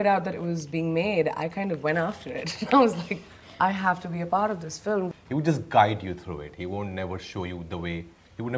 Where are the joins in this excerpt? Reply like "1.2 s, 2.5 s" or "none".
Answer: 5.2 s